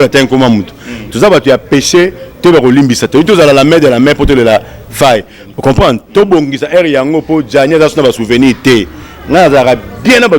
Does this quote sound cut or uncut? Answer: cut